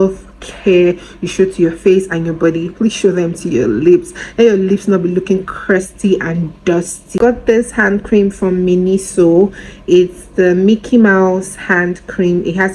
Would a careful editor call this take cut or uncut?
cut